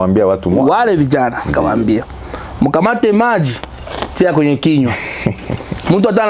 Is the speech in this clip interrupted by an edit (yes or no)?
no